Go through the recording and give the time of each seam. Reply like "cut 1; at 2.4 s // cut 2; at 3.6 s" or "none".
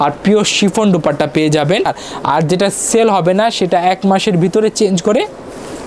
cut 1; at 2.0 s